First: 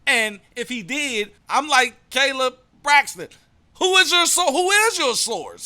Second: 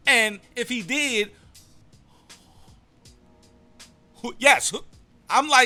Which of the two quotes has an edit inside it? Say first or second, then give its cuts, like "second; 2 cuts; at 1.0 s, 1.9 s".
first; 1 cut; at 1.4 s